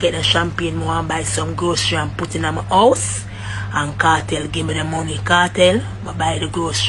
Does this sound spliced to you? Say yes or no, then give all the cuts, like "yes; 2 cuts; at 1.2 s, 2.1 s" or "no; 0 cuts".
no; 0 cuts